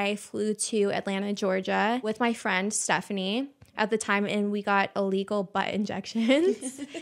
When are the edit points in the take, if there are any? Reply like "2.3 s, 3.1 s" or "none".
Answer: none